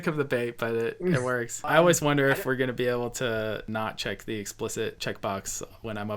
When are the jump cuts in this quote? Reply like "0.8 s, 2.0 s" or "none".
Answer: 1.6 s, 3.7 s